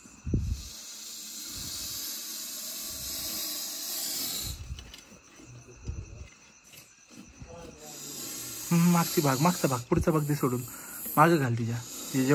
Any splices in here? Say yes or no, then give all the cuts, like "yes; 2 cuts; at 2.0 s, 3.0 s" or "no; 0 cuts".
no; 0 cuts